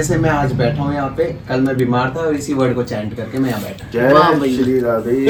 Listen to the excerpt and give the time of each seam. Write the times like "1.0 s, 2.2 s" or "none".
none